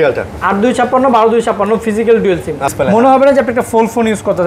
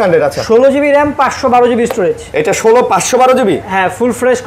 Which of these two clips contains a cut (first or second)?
first